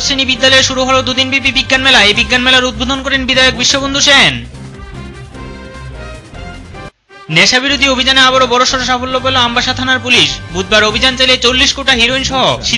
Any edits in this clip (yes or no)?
no